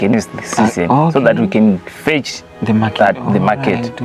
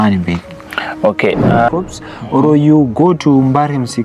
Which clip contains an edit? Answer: second; 1 cut; at 1.7 s

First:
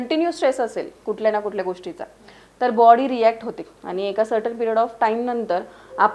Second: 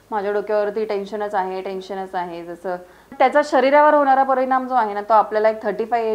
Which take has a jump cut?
second; 1 cut; at 3.1 s

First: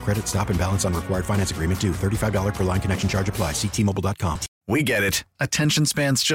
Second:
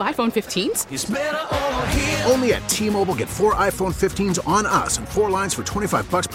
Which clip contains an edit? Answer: first; 1 cut; at 4.5 s

